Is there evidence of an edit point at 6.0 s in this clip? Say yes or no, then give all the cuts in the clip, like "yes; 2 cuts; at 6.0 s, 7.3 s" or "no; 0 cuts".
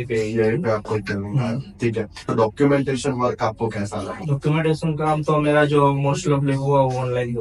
no; 2 cuts; at 2.2 s, 4.2 s